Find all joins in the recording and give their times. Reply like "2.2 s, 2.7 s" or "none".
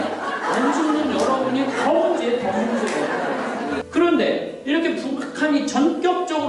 3.8 s